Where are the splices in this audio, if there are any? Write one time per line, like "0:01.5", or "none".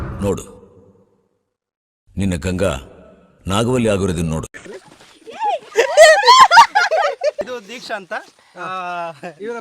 0:07.4